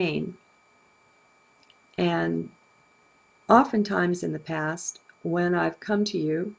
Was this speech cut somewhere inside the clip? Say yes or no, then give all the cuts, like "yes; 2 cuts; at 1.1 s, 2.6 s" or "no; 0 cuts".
yes; 1 cut; at 4.9 s